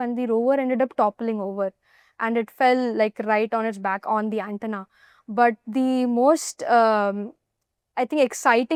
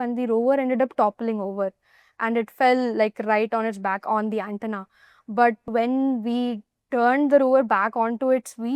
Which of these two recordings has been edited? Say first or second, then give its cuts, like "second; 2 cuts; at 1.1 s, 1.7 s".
second; 1 cut; at 5.7 s